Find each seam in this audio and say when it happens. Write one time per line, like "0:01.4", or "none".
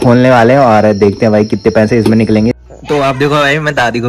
0:02.6